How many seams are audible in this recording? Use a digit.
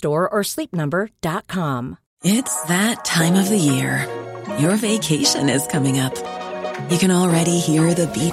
1